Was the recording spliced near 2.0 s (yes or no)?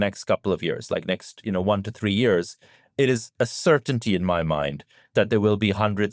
no